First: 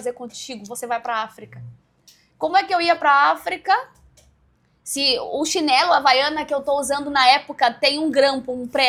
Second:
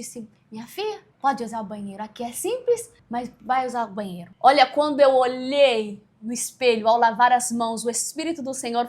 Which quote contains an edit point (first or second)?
second